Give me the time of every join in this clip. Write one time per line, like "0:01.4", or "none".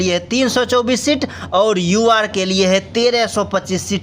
none